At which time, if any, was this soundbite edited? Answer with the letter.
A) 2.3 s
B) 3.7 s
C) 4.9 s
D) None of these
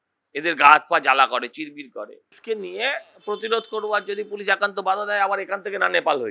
A